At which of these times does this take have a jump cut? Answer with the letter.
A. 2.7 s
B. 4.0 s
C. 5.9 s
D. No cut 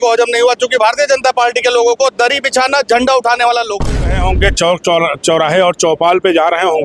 B